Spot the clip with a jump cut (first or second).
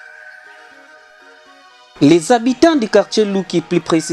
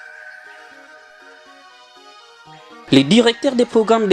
first